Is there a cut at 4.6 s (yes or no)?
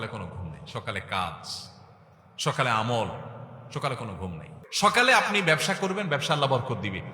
yes